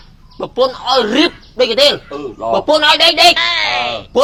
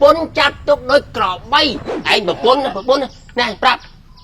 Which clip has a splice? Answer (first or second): second